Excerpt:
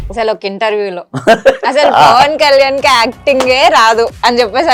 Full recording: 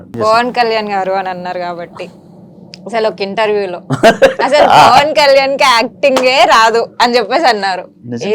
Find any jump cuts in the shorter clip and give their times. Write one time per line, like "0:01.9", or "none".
none